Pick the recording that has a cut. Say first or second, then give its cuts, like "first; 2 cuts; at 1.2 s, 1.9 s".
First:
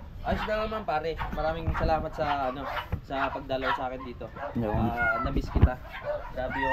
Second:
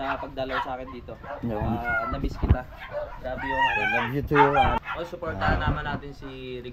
second; 1 cut; at 4.8 s